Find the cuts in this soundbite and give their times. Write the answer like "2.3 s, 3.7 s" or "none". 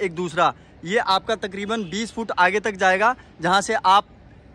none